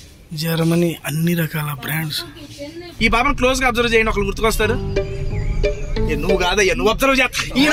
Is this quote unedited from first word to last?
no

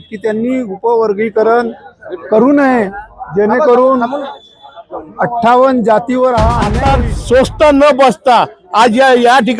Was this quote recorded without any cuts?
no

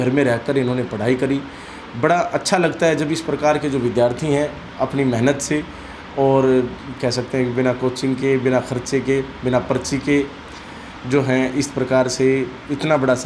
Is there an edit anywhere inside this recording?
no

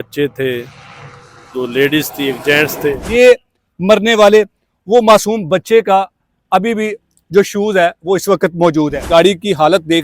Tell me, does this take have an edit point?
yes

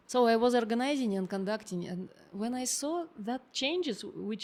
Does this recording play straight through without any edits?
yes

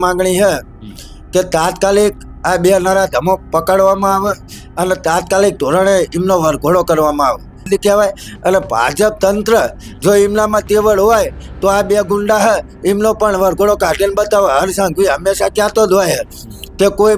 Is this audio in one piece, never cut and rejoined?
no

